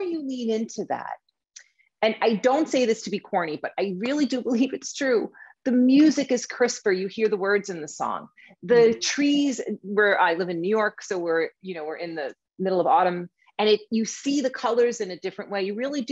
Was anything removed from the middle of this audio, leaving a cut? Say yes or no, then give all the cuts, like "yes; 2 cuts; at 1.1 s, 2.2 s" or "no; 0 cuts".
no; 0 cuts